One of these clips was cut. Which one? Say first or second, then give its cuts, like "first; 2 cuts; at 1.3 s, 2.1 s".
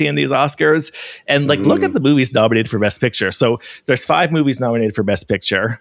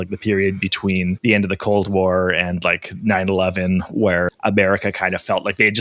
second; 2 cuts; at 1.2 s, 4.3 s